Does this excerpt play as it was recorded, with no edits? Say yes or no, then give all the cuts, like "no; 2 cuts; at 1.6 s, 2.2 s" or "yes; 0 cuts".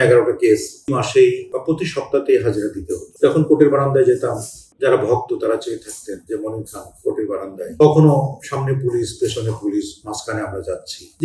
no; 1 cut; at 0.9 s